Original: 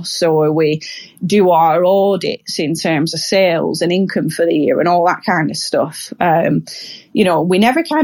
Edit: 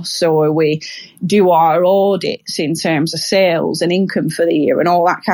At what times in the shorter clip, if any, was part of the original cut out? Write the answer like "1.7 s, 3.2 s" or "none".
none

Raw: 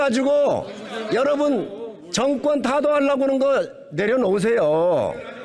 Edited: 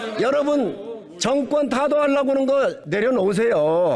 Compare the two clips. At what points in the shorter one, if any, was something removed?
2.8 s

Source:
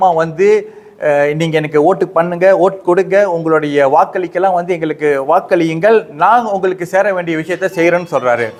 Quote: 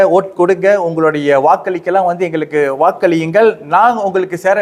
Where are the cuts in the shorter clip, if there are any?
none

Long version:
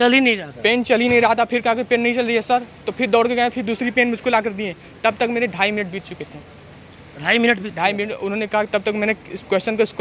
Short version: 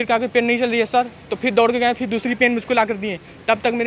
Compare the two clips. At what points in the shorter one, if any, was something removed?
none

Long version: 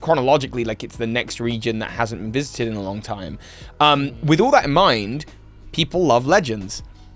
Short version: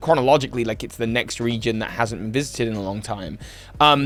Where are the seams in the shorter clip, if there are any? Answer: none

